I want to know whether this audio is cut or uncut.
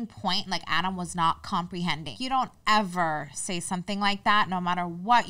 cut